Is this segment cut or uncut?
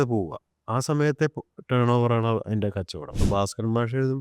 cut